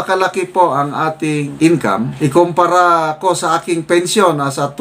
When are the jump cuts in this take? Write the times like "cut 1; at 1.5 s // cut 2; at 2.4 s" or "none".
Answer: none